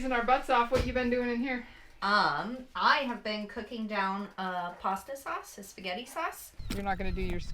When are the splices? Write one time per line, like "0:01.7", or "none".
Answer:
0:06.5